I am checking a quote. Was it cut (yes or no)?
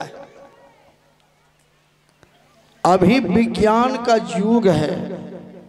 yes